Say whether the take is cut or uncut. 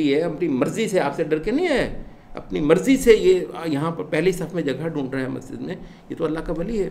uncut